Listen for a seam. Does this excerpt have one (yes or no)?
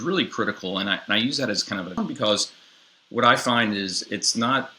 yes